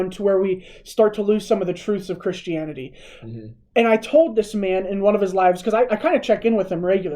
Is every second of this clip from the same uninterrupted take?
yes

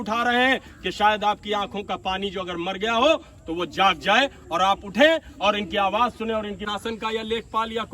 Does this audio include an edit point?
yes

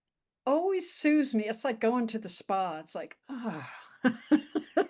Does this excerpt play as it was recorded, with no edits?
yes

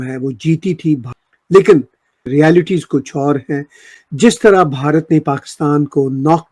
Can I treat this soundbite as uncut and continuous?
no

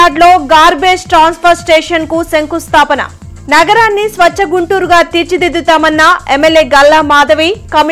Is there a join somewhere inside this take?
no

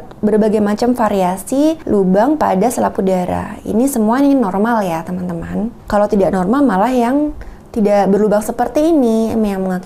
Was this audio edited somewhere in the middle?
yes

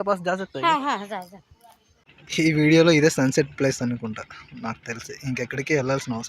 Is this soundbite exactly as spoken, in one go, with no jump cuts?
no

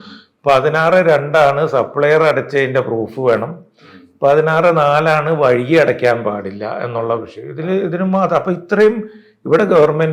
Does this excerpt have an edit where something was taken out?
no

